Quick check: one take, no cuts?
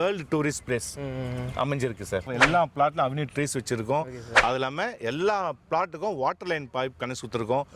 no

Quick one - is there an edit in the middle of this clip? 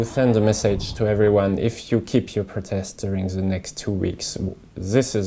no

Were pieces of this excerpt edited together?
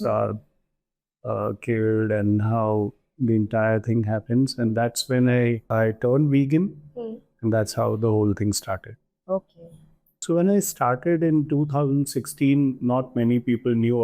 yes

